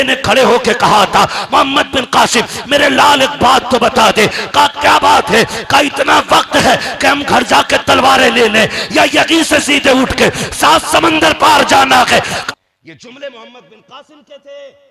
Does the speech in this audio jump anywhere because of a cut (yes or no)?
yes